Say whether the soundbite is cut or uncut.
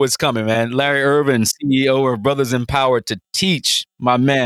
uncut